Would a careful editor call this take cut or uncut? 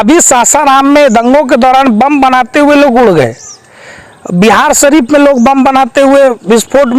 uncut